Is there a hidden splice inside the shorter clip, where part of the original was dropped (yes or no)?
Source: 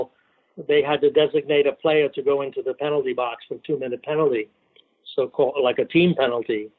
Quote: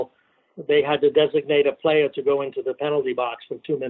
no